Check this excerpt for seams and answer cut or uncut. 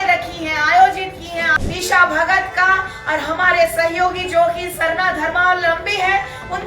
cut